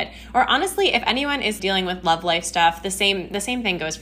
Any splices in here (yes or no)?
yes